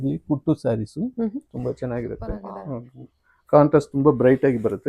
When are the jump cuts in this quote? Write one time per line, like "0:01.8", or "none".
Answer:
0:02.5